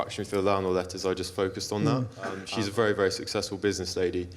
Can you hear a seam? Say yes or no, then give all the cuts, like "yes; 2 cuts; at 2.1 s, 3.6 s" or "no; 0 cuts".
yes; 1 cut; at 2.4 s